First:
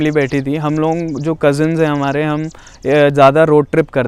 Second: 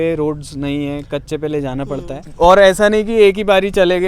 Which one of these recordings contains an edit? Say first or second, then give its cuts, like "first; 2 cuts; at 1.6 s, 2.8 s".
second; 1 cut; at 2.2 s